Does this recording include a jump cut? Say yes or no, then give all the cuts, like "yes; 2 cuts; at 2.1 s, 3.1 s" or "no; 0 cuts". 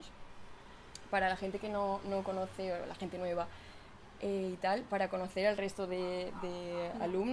no; 0 cuts